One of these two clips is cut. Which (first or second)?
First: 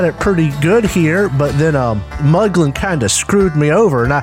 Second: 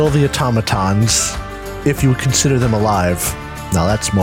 first